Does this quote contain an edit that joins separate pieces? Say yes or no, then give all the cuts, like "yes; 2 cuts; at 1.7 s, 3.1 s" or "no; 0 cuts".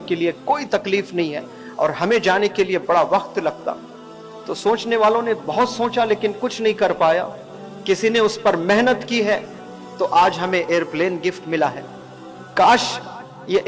no; 0 cuts